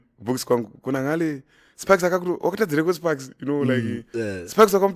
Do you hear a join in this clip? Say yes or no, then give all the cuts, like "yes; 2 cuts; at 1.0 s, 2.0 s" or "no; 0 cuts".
no; 0 cuts